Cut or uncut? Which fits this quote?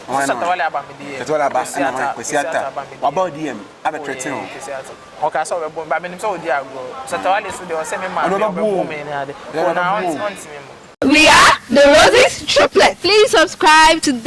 cut